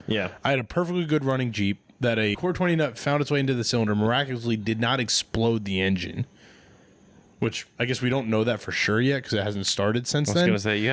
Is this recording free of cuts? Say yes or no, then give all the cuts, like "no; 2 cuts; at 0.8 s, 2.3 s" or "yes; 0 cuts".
no; 1 cut; at 2.4 s